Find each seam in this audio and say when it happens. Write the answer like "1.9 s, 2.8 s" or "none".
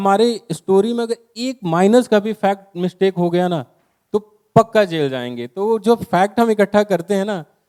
none